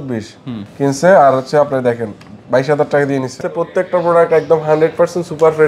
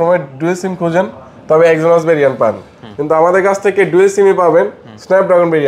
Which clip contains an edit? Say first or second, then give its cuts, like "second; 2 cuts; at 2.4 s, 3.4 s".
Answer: first; 1 cut; at 3.5 s